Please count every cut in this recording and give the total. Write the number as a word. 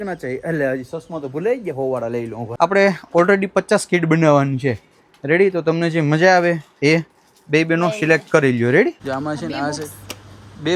two